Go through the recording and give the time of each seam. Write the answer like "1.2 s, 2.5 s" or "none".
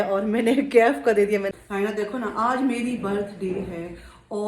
1.5 s

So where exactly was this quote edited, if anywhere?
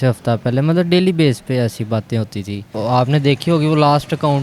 2.6 s

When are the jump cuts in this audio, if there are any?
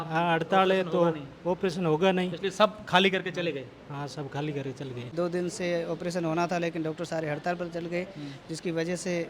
5.1 s

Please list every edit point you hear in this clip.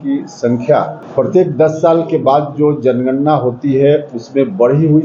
1.0 s

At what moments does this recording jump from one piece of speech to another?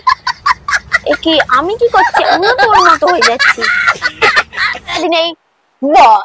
5.0 s

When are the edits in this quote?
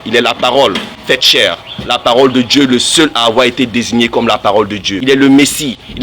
0.9 s, 4.9 s

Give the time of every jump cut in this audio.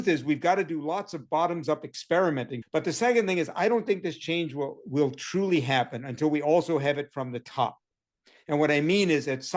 2.6 s

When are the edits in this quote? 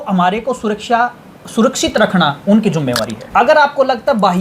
3.2 s

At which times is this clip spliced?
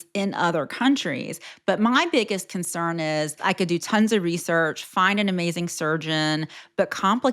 3.4 s

